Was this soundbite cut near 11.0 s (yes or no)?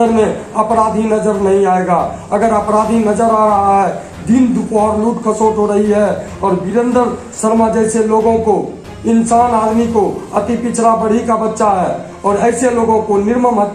no